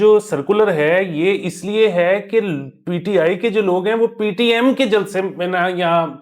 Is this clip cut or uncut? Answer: uncut